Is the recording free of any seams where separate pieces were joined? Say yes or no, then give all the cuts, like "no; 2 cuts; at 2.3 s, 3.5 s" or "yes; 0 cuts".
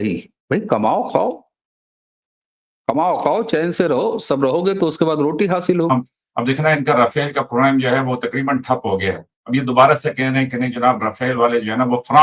no; 1 cut; at 5.9 s